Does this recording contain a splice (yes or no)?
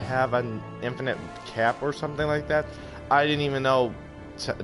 yes